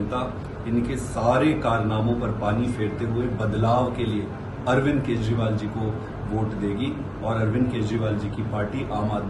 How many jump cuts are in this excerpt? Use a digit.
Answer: 0